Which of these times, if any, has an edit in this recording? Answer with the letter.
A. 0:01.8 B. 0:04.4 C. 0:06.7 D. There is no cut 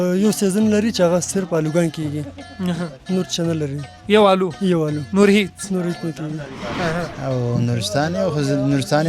C